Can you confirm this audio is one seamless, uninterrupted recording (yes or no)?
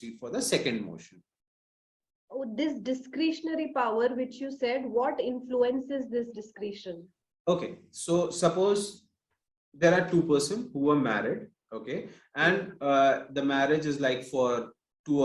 yes